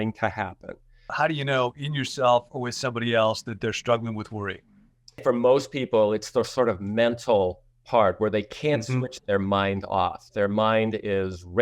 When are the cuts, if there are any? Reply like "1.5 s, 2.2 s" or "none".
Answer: 1.1 s, 5.2 s